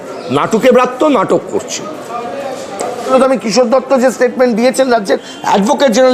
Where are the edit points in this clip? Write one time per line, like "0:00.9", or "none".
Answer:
0:03.1